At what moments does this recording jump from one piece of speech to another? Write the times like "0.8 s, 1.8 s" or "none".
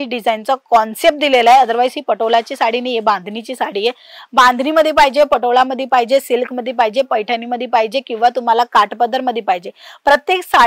none